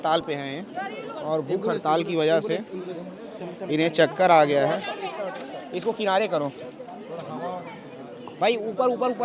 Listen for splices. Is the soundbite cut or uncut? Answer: uncut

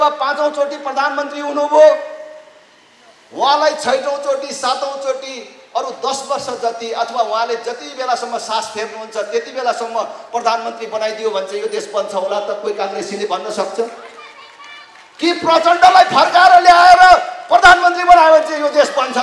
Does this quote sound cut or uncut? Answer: uncut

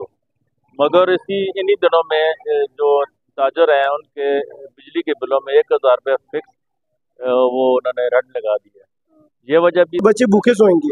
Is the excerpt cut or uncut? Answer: cut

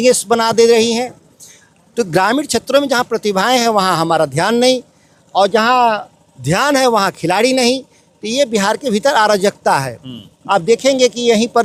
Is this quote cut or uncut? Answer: uncut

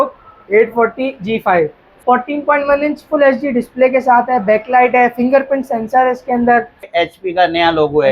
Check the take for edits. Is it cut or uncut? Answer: cut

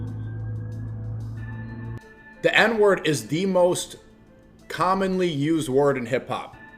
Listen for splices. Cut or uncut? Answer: cut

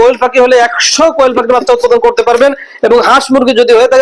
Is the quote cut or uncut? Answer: uncut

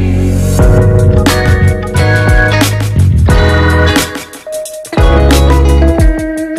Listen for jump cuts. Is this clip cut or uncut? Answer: uncut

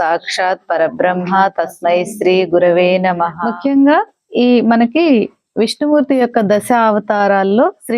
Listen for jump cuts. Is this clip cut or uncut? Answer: cut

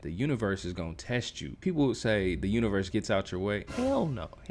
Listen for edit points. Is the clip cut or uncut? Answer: uncut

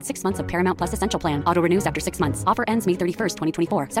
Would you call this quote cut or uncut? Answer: uncut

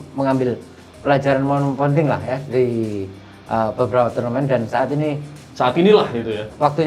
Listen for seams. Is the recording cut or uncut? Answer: uncut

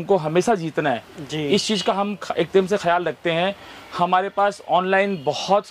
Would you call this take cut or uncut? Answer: uncut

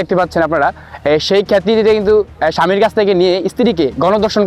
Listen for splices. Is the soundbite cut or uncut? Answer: uncut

